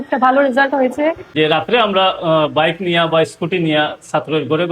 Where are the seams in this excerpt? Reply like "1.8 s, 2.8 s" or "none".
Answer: 1.3 s